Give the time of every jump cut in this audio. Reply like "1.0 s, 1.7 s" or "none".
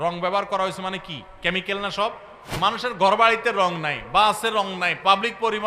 2.4 s